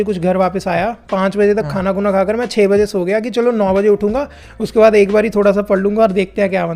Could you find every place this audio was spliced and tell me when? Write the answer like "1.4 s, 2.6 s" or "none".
none